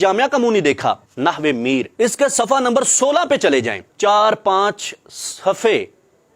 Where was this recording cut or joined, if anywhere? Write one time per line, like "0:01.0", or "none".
0:01.1
0:03.8